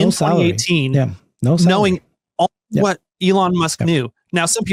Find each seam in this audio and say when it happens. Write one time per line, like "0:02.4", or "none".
none